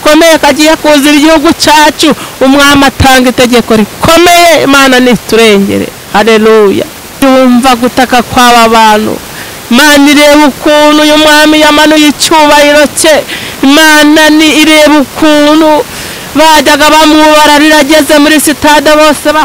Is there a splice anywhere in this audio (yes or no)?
yes